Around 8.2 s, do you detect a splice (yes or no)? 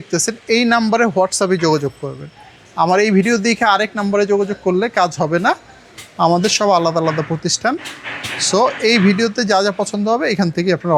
no